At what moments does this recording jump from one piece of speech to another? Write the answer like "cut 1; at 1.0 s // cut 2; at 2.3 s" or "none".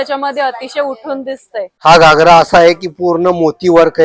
cut 1; at 1.7 s